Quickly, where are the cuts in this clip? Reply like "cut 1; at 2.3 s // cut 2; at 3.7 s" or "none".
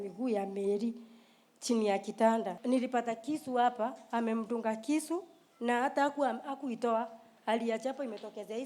cut 1; at 2.6 s

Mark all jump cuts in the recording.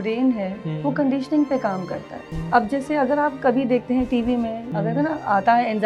cut 1; at 2.3 s // cut 2; at 4.6 s

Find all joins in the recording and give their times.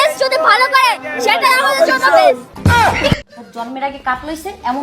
cut 1; at 2.5 s // cut 2; at 3.4 s

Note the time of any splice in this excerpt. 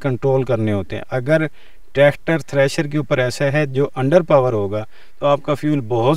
none

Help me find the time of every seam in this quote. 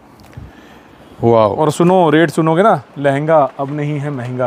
cut 1; at 1.4 s

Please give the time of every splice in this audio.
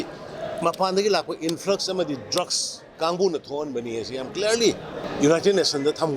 cut 1; at 2.9 s // cut 2; at 5.0 s

